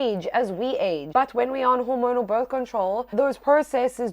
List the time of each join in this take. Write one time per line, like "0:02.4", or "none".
0:01.0
0:03.1